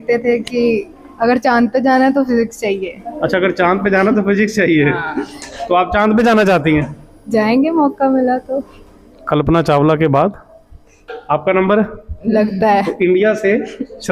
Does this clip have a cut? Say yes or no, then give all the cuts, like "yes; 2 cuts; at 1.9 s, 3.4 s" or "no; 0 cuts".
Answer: no; 0 cuts